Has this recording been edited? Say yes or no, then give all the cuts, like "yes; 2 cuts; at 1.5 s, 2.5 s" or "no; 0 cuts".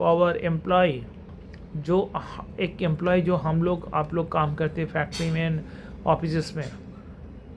no; 0 cuts